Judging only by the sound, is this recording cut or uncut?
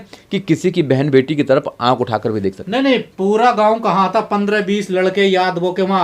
uncut